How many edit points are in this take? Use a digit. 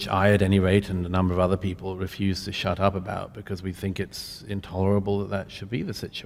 0